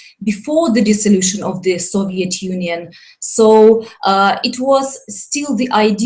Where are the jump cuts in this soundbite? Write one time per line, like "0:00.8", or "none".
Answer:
none